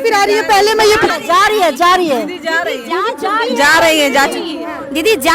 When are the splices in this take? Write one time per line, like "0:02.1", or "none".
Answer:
0:01.0